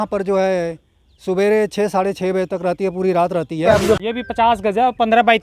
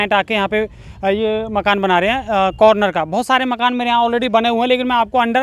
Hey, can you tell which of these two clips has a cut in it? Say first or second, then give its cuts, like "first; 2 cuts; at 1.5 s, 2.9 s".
first; 1 cut; at 4.0 s